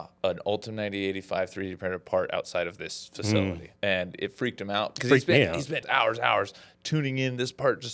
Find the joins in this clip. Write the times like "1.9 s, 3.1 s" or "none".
3.7 s, 5.0 s, 5.8 s